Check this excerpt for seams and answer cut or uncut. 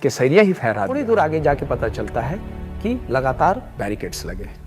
cut